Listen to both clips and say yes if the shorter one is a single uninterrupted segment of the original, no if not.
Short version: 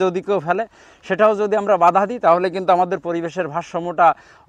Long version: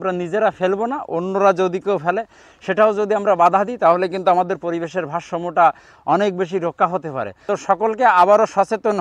yes